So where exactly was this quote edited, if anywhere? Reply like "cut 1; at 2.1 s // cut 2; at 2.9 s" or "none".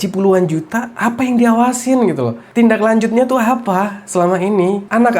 cut 1; at 0.9 s